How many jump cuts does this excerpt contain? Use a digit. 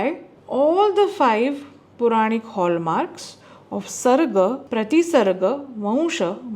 1